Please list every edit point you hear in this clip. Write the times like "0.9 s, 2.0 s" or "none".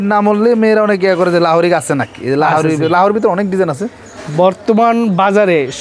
none